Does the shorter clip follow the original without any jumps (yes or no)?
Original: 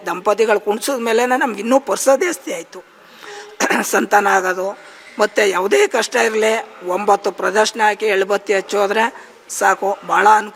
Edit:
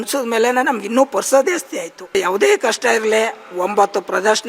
no